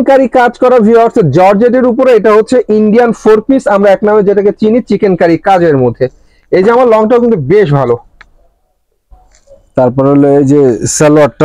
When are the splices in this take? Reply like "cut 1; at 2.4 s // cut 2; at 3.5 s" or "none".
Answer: none